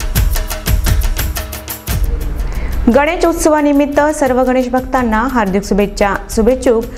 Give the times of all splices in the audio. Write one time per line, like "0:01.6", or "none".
none